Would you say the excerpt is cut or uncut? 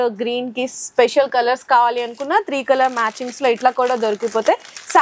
uncut